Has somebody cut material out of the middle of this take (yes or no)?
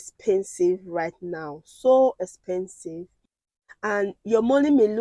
no